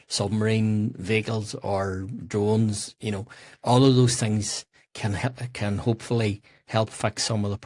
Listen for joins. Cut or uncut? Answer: uncut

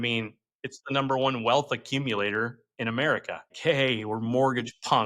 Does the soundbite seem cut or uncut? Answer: cut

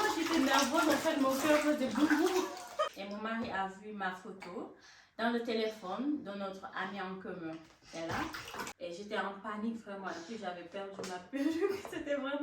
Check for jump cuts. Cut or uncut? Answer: cut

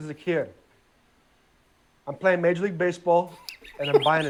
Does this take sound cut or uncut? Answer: uncut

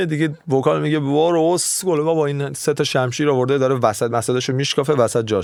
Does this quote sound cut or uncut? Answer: uncut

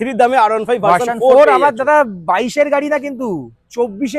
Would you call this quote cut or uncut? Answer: uncut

